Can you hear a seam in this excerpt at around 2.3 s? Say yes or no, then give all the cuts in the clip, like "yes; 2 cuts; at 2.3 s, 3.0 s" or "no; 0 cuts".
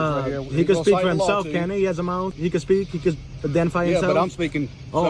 yes; 1 cut; at 2.3 s